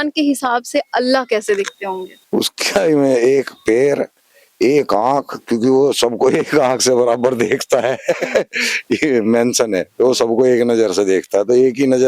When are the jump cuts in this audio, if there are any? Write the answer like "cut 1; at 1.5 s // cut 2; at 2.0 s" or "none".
cut 1; at 2.1 s